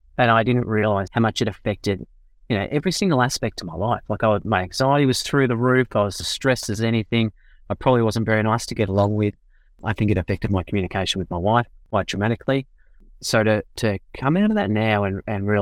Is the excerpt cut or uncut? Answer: cut